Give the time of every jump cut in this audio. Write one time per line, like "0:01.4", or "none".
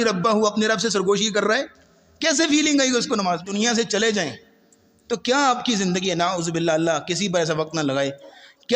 0:03.5